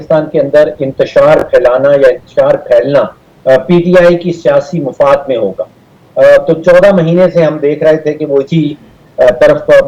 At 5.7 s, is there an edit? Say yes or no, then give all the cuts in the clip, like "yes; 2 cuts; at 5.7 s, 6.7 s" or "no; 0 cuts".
no; 0 cuts